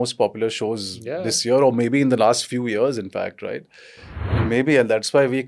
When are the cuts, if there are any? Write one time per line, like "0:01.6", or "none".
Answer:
0:04.3